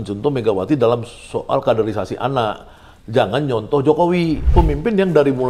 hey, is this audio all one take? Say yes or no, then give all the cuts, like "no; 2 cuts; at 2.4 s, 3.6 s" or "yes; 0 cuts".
no; 1 cut; at 4.5 s